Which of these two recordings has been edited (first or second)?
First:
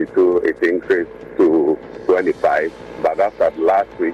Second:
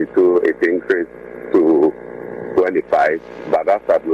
first